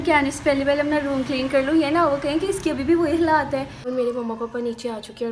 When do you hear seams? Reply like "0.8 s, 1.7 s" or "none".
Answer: 3.9 s

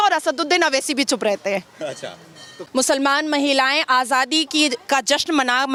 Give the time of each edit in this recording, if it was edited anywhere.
none

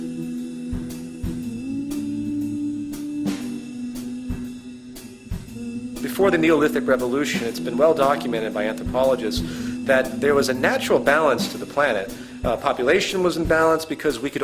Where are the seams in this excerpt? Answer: 12.6 s

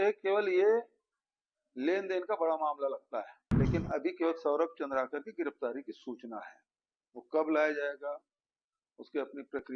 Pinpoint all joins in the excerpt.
3.4 s

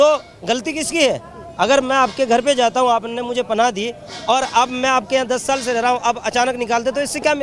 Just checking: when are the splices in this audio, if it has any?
none

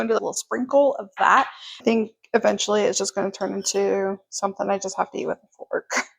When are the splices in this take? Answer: 1.6 s

